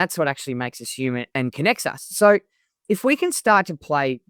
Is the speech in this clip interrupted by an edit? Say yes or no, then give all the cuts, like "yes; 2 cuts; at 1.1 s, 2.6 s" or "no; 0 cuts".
no; 0 cuts